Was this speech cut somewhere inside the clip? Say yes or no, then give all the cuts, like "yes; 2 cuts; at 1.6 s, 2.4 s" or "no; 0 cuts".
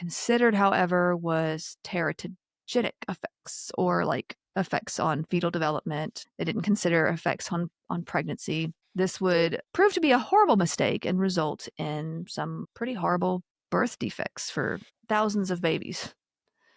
yes; 6 cuts; at 6.2 s, 8.8 s, 9.6 s, 12.6 s, 13.5 s, 14.9 s